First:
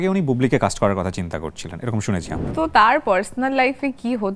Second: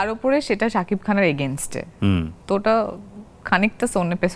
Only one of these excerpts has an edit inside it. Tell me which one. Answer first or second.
first